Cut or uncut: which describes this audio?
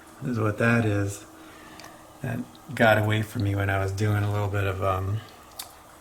uncut